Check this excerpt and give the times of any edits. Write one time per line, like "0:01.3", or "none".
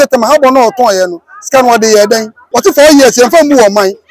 0:02.4